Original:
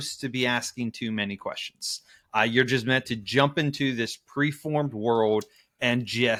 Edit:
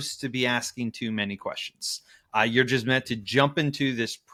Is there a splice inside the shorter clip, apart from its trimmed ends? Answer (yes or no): no